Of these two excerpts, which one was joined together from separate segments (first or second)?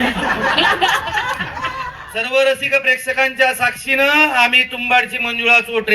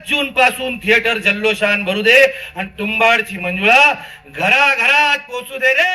first